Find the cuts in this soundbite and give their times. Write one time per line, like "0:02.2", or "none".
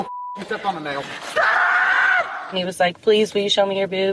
0:02.4